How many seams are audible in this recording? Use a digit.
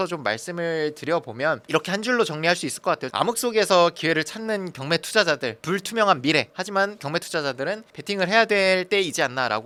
0